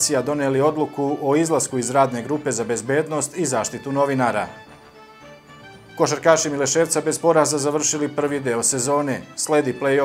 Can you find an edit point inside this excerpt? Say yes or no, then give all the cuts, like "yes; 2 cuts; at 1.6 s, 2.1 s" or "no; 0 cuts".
yes; 2 cuts; at 4.5 s, 5.8 s